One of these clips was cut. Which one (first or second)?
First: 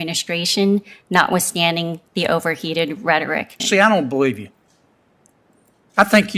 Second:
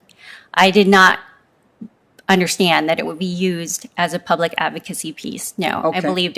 first